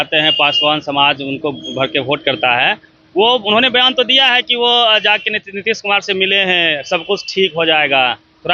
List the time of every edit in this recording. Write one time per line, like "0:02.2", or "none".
none